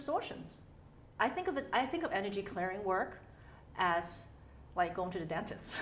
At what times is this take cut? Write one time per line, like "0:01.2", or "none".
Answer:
0:01.0